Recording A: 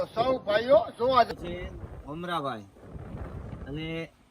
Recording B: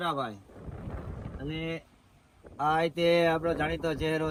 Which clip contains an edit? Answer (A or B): A